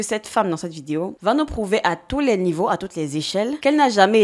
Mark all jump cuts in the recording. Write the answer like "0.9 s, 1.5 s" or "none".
1.2 s